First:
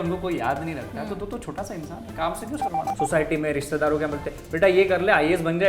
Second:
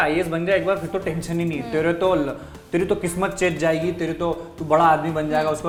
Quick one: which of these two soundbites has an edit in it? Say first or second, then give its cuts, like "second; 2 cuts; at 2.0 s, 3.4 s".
first; 1 cut; at 2.9 s